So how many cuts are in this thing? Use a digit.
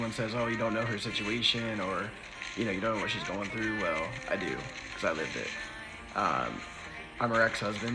0